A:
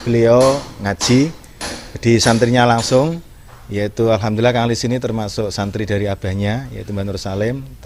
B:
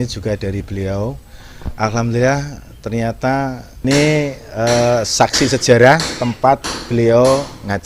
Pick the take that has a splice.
B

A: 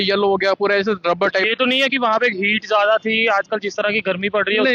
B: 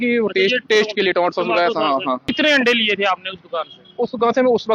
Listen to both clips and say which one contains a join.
B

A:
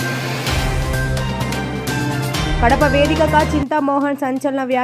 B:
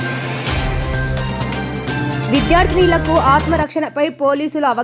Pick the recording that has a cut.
B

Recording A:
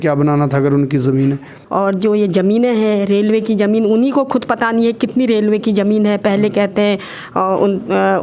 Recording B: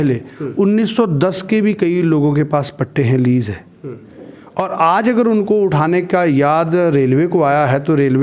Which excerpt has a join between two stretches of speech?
A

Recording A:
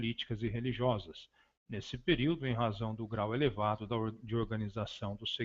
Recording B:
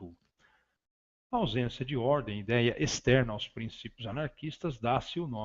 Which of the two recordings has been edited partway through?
A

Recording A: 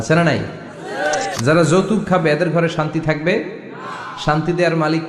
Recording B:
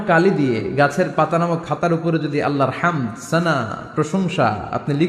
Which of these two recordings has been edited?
A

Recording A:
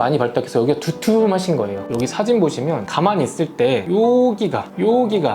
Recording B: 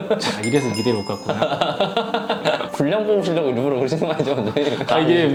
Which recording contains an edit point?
A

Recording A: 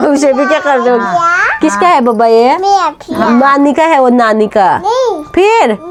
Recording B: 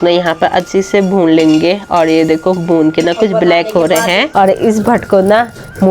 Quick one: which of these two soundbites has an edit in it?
B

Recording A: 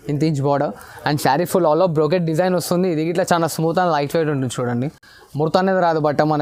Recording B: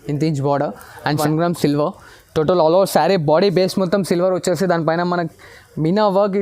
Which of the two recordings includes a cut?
B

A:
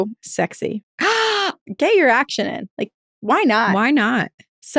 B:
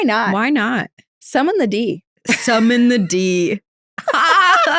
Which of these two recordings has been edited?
A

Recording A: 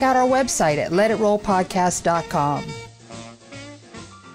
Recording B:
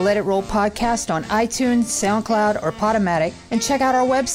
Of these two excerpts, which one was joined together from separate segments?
A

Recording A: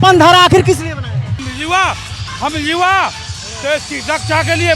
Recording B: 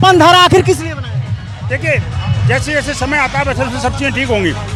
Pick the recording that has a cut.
A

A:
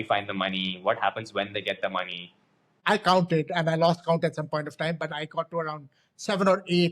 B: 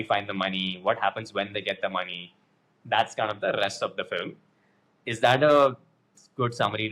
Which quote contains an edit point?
A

